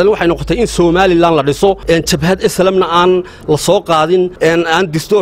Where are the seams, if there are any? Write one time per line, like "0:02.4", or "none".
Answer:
0:01.8
0:04.3